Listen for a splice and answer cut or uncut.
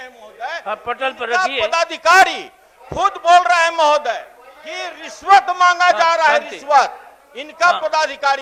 uncut